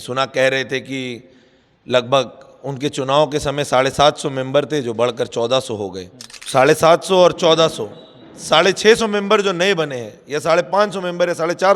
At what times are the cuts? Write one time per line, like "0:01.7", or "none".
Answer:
0:06.3